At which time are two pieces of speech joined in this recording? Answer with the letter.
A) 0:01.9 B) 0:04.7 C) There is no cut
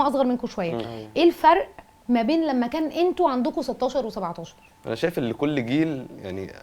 B